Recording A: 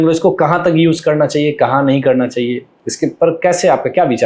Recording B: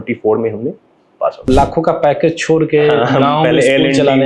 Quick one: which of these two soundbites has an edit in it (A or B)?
B